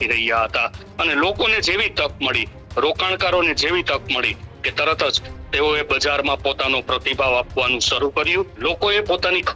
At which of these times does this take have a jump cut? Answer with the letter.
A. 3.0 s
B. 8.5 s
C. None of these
B